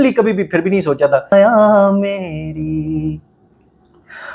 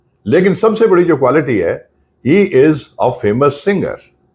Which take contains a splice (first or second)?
first